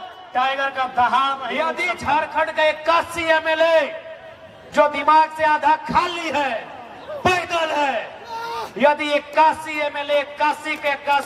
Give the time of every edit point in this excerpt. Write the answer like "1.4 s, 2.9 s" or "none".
1.7 s